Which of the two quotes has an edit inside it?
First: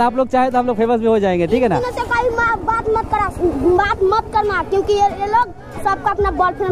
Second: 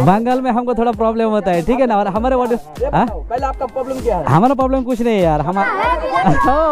second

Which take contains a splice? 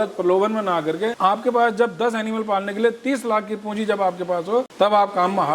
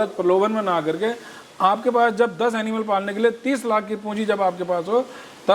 first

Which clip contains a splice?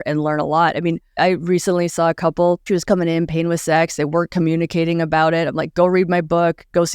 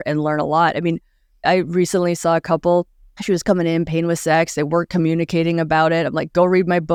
first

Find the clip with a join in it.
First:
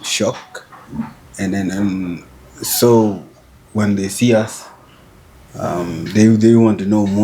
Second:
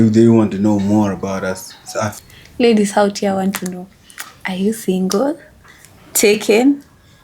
second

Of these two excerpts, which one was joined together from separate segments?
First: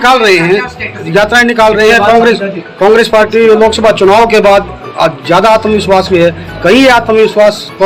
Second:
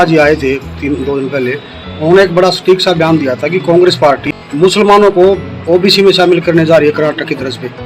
second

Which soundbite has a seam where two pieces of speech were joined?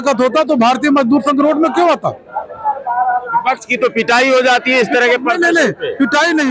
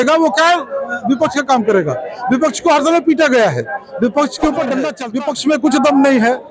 second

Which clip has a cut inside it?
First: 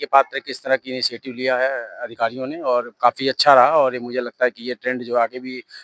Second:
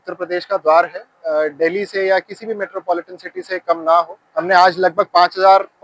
second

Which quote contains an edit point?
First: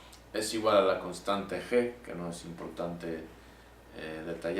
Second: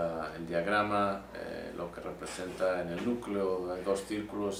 first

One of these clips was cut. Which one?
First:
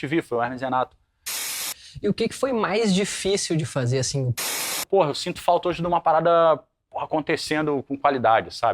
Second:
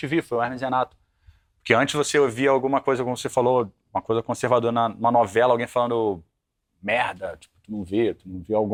first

